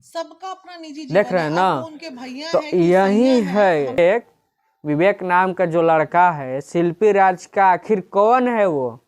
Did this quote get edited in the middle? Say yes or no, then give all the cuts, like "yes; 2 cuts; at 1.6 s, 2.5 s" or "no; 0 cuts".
yes; 2 cuts; at 1.1 s, 4.0 s